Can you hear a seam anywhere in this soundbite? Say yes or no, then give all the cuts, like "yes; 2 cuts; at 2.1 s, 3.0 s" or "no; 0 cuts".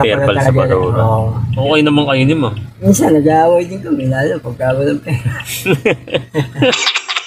yes; 1 cut; at 1.6 s